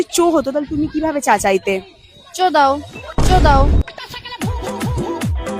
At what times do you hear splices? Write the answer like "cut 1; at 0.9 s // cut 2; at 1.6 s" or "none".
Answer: none